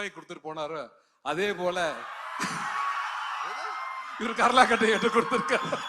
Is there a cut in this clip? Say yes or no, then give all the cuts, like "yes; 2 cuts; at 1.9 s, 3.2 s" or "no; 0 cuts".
no; 0 cuts